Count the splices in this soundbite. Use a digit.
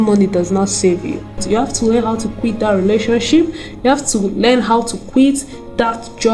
1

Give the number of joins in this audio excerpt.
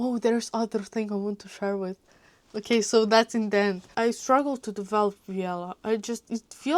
1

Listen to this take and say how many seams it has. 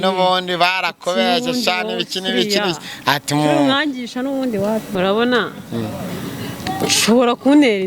1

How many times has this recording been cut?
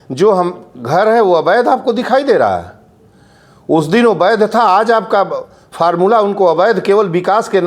0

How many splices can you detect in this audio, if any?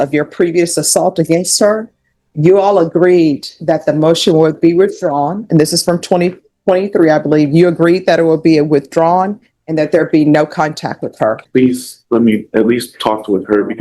1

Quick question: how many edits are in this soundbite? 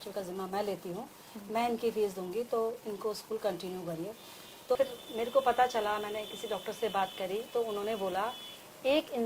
1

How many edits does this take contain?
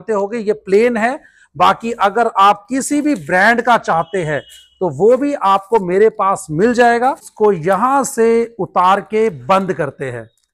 1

